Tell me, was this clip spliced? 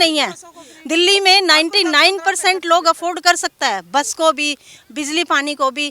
no; 0 cuts

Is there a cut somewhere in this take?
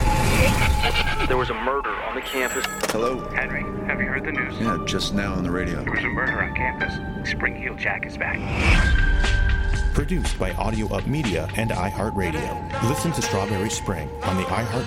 no; 0 cuts

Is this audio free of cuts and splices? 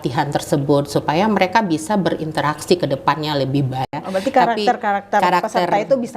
no; 1 cut; at 3.9 s

